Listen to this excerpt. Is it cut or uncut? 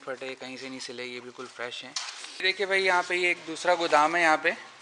cut